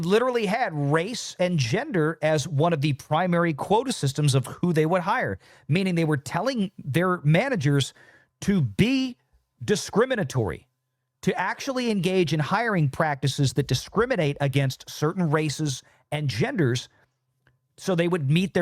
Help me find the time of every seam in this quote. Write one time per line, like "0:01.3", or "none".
none

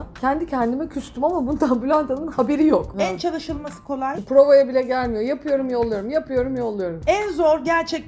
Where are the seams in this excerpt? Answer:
0:02.9
0:04.2

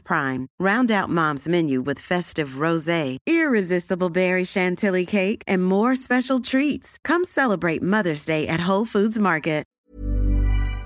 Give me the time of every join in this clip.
0:09.8

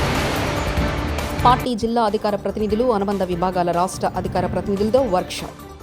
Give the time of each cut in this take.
0:01.4

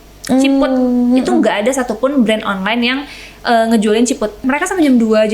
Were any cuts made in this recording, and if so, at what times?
0:04.4

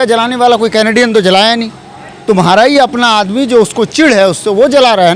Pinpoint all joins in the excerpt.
none

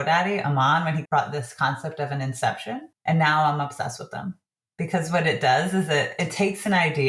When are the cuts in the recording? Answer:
0:01.0
0:02.9

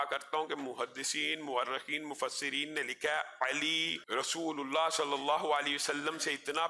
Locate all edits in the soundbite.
0:04.0

